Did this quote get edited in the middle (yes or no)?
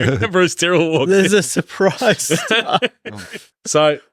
no